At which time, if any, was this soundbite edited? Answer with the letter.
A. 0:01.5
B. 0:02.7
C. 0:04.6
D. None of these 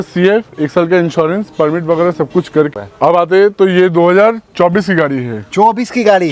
B